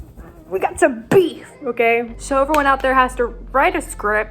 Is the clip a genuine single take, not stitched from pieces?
no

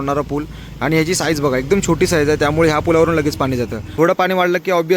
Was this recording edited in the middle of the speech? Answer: yes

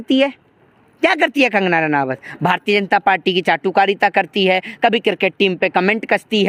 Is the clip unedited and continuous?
yes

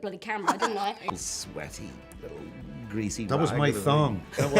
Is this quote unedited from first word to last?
no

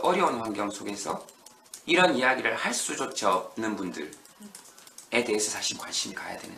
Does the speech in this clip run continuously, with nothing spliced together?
yes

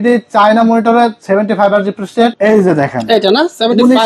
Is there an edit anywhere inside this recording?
yes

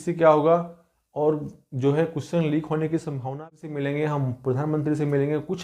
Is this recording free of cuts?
no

